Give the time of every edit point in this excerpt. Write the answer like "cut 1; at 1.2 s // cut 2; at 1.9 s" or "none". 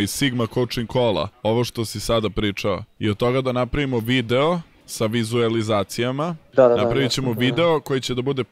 cut 1; at 1.3 s // cut 2; at 2.9 s // cut 3; at 4.8 s // cut 4; at 6.4 s